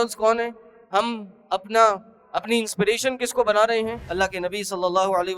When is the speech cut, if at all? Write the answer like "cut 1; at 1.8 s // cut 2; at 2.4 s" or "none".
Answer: cut 1; at 4.0 s